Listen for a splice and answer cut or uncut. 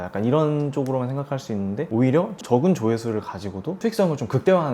uncut